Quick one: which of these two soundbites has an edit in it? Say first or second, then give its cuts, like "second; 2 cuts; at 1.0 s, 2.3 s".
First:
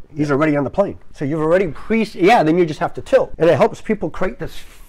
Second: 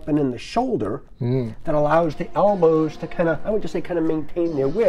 first; 2 cuts; at 1.1 s, 3.3 s